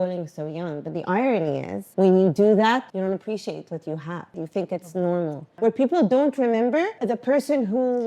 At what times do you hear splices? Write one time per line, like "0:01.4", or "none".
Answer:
0:01.8
0:02.9
0:04.3
0:05.4
0:07.0